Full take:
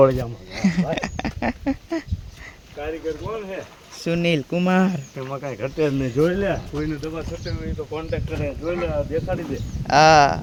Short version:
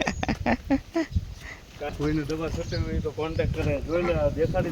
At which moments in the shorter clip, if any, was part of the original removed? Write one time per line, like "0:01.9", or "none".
0:01.9